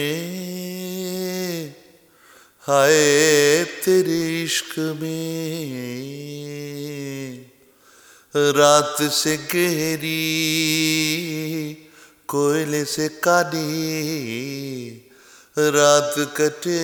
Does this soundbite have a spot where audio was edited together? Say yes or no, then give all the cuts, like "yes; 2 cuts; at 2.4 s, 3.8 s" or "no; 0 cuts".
no; 0 cuts